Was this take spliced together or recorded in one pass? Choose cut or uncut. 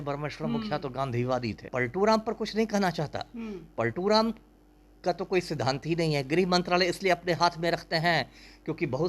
cut